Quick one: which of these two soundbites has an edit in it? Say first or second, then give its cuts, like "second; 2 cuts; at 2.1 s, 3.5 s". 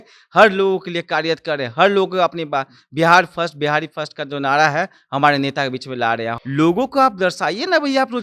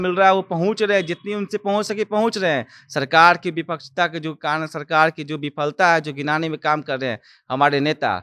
first; 1 cut; at 6.3 s